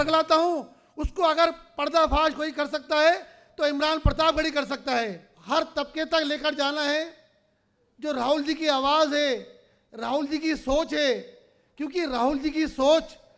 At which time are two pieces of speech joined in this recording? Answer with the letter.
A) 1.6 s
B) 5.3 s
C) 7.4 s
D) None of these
B